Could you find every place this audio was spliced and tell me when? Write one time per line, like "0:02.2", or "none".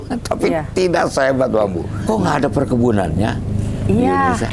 0:01.9